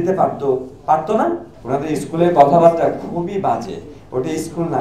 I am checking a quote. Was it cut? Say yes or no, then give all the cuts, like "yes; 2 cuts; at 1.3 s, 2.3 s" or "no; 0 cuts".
yes; 1 cut; at 1.5 s